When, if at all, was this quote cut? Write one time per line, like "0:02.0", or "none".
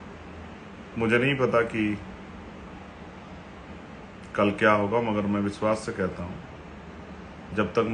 none